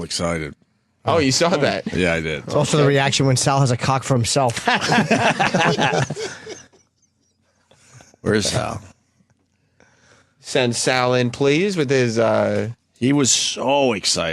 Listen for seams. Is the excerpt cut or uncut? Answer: uncut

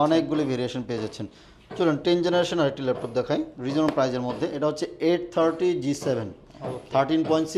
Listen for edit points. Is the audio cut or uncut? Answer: uncut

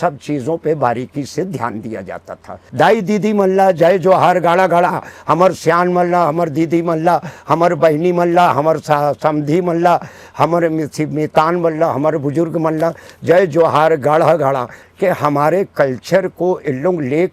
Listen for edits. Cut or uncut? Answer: cut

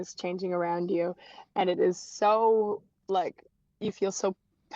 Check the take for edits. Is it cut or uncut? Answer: uncut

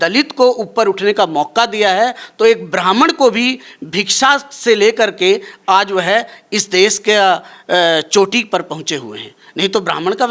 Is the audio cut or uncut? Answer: uncut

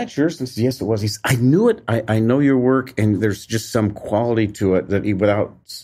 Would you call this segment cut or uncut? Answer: uncut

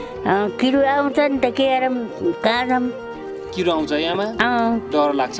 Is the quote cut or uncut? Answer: uncut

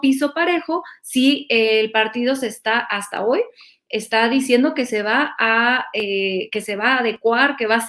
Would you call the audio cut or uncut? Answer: uncut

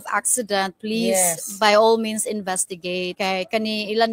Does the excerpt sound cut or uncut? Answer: cut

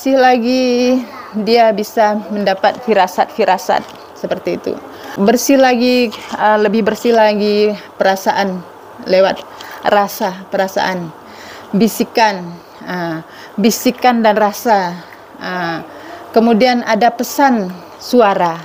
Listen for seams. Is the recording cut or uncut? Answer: cut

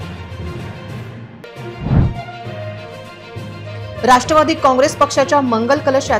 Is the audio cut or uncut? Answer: cut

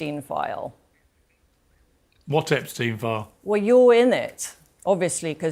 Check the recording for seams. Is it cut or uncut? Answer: uncut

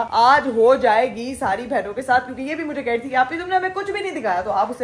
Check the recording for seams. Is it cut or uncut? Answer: uncut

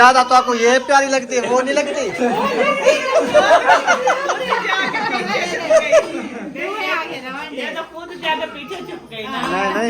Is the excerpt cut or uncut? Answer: uncut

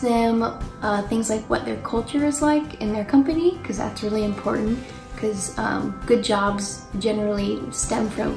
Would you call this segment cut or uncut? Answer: uncut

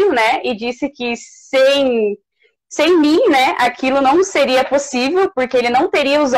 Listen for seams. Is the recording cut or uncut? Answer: uncut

